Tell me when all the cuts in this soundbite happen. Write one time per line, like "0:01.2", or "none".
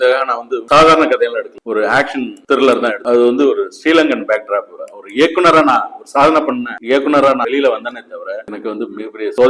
0:03.0
0:04.7
0:07.4